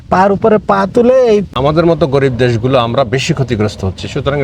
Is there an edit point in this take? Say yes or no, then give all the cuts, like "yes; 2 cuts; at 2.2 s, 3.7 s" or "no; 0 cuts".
yes; 1 cut; at 1.5 s